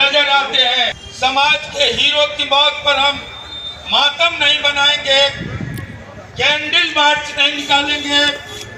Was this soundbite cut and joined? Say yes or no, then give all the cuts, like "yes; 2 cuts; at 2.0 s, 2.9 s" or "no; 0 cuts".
yes; 1 cut; at 1.0 s